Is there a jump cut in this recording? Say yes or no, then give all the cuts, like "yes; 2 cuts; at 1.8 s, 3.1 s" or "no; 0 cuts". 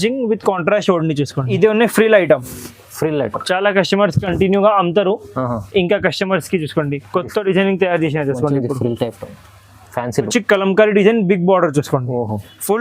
yes; 2 cuts; at 1.6 s, 10.3 s